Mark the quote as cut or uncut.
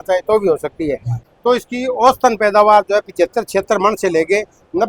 cut